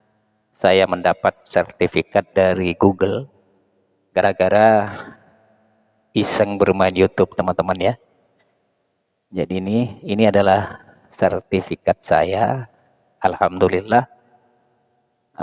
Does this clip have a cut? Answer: no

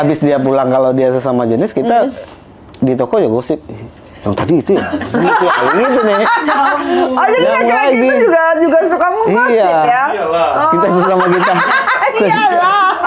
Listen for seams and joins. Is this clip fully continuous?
yes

